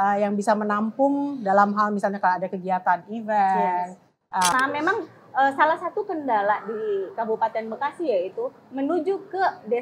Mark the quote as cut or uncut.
cut